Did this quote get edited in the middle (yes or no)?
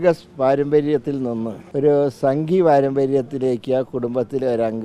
yes